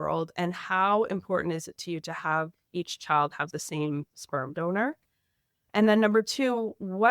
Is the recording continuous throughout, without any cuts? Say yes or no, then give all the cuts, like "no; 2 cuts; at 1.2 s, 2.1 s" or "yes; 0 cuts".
yes; 0 cuts